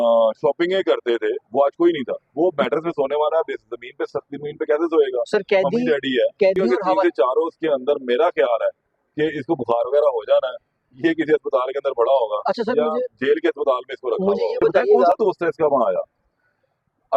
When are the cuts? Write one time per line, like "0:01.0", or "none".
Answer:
0:02.2
0:06.8
0:15.1